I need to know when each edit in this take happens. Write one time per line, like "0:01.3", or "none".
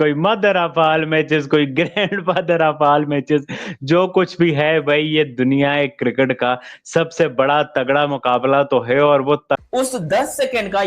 0:09.6